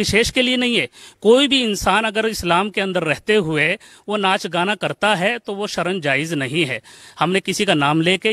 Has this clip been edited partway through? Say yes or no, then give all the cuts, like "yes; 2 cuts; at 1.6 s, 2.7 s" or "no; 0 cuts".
no; 0 cuts